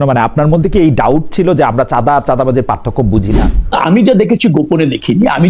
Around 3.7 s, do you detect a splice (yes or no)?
yes